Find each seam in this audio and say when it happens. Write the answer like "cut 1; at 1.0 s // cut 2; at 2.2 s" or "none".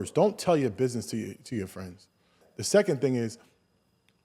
cut 1; at 2.5 s